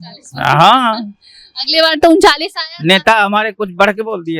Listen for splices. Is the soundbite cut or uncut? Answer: uncut